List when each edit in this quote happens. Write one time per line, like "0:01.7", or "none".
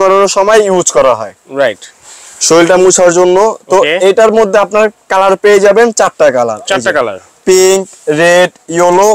none